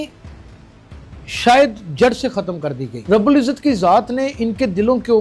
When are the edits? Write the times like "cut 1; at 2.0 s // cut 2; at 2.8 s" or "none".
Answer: cut 1; at 2.9 s